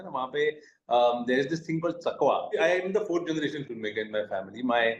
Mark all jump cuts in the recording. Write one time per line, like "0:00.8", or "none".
0:02.5